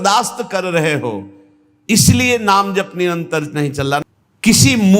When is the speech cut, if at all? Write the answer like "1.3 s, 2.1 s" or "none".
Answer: 4.0 s